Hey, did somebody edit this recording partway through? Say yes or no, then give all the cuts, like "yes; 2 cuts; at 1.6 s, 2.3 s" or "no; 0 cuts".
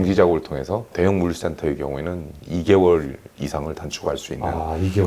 no; 0 cuts